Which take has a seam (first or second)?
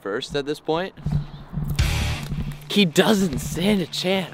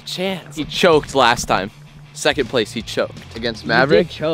first